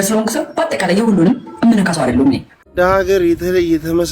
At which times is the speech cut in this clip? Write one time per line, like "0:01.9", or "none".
0:02.6